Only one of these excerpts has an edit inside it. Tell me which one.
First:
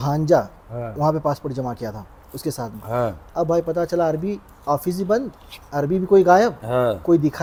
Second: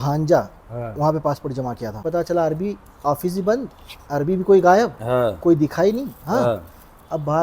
second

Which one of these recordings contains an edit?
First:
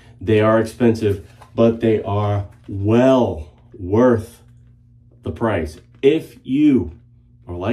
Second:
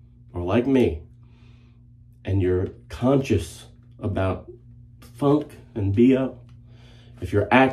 second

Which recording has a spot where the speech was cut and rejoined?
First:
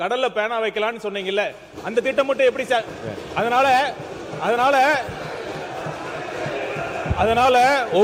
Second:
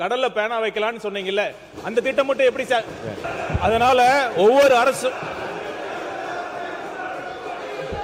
second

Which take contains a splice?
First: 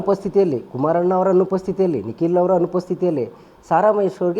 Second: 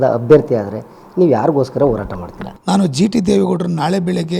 second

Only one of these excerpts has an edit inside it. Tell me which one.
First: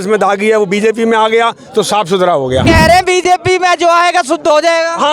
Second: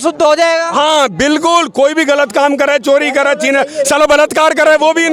first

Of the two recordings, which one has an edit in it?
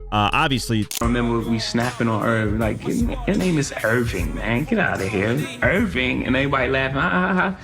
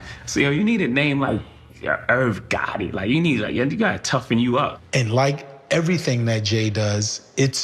first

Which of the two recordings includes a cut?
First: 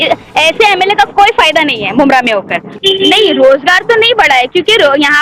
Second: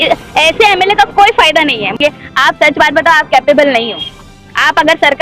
second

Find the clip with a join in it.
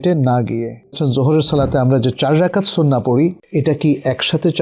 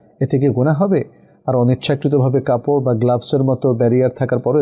first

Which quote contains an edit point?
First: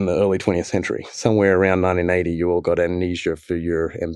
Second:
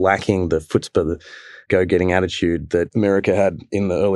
second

